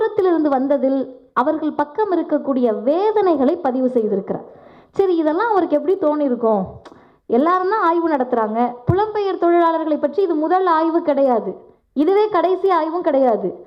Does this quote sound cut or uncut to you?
uncut